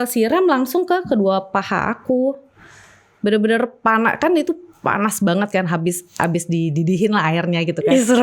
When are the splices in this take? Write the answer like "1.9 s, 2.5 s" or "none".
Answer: none